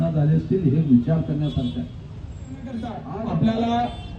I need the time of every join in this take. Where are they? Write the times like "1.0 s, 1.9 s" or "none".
2.7 s

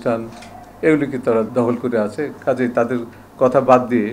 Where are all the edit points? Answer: 1.5 s

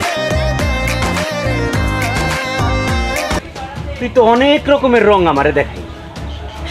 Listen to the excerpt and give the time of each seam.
3.4 s

